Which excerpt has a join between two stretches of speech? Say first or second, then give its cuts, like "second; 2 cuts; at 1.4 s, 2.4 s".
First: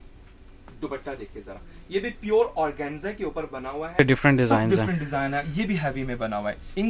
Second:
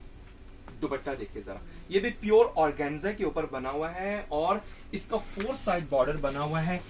first; 1 cut; at 4.0 s